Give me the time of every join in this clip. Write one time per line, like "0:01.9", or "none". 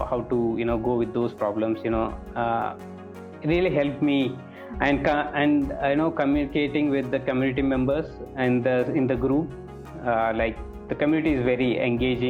none